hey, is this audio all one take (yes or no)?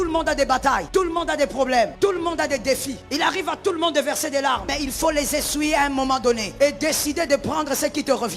no